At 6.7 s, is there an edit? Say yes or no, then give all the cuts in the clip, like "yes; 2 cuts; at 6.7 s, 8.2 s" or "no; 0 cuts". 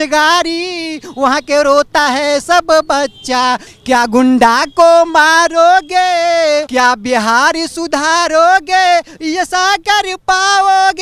yes; 2 cuts; at 3.7 s, 6.7 s